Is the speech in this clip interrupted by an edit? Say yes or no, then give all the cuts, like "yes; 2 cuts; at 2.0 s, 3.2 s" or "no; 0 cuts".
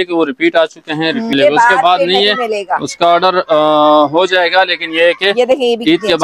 yes; 1 cut; at 1.3 s